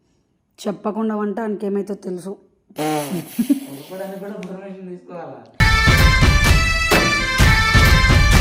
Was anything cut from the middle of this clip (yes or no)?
no